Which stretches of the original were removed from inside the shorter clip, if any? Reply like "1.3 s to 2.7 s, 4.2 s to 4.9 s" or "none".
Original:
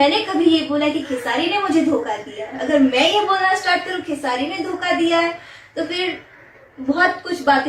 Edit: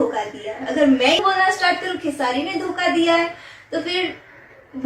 3.1 s to 3.2 s